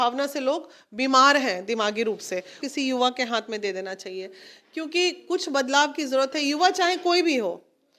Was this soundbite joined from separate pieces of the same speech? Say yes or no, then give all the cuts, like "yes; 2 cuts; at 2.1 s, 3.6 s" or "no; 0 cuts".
yes; 1 cut; at 2.6 s